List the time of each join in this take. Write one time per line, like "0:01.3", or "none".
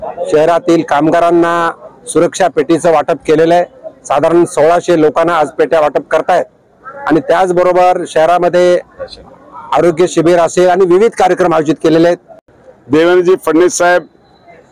0:12.4